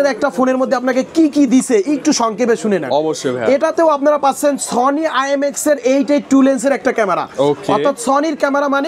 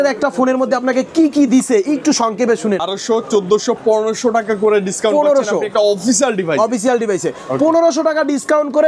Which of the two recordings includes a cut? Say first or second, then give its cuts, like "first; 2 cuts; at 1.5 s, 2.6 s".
second; 1 cut; at 2.8 s